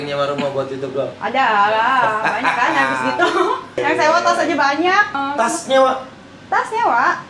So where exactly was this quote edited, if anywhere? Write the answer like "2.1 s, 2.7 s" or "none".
3.8 s, 5.1 s